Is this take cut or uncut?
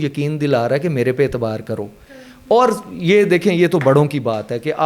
uncut